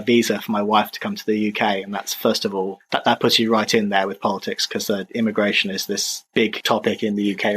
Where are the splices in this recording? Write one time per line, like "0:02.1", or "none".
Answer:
0:06.4